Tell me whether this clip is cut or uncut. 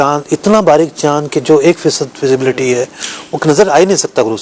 uncut